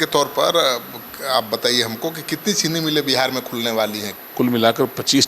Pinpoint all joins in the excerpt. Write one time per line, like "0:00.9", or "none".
0:04.1